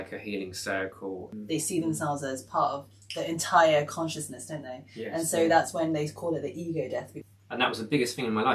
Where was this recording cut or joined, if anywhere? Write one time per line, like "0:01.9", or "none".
0:01.3
0:07.1